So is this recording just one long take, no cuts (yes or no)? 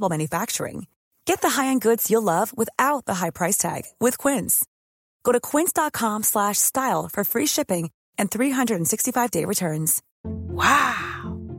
no